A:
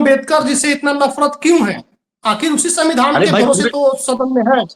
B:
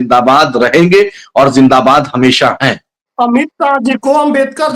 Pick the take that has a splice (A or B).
B